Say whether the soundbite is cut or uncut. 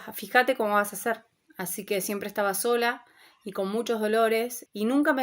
cut